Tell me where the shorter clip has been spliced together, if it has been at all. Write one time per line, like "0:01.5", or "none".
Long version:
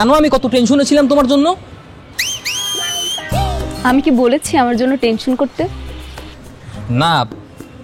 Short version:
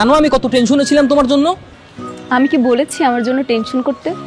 0:02.1